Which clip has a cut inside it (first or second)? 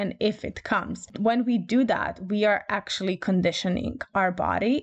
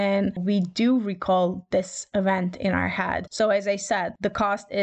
first